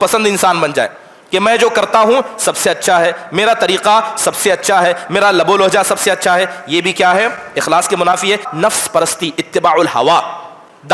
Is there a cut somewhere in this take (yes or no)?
yes